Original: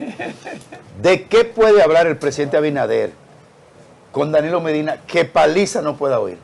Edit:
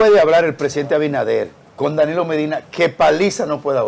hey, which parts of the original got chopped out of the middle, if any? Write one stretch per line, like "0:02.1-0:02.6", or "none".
0:03.2-0:04.0